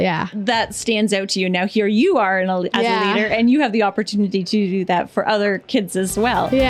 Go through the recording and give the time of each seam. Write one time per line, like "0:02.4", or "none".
none